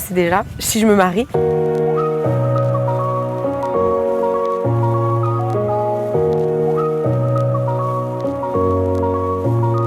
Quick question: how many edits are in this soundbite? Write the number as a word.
one